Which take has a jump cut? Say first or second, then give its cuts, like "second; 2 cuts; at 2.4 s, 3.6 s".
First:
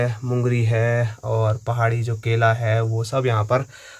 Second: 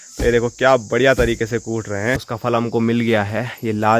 second; 1 cut; at 2.3 s